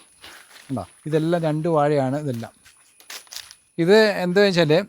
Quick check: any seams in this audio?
no; 0 cuts

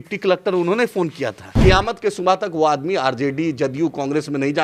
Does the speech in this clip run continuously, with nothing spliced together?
no; 1 cut; at 1.6 s

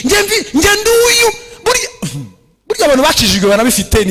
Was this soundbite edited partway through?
no; 0 cuts

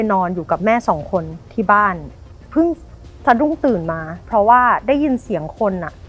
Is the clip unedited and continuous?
no; 1 cut; at 2.5 s

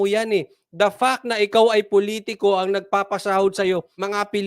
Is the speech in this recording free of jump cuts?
yes; 0 cuts

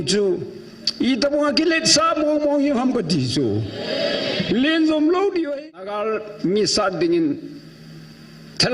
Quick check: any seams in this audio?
yes; 1 cut; at 5.5 s

